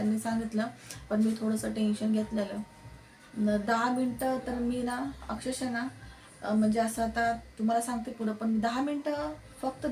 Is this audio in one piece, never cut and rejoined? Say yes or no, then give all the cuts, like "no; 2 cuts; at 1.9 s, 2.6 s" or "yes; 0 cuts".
yes; 0 cuts